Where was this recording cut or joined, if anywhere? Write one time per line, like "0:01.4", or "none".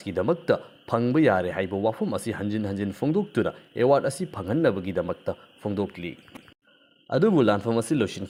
none